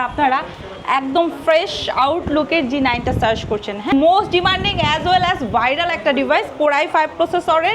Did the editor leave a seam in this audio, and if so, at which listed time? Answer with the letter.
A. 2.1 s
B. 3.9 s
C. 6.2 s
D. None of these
B